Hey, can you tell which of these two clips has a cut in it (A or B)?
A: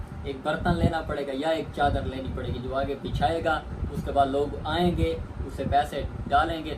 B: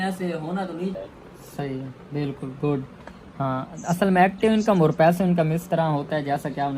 B